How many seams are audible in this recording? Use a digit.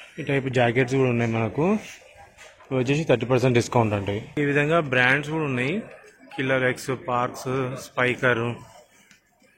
1